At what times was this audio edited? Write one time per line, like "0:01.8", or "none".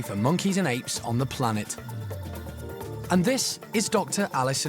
0:01.7
0:03.1